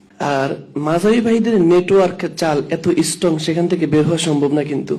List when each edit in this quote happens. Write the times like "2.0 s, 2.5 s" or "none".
none